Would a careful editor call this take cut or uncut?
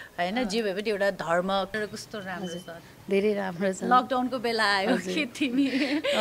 cut